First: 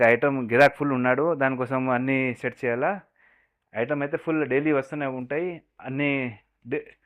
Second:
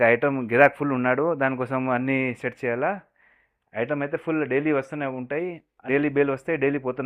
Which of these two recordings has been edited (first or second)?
second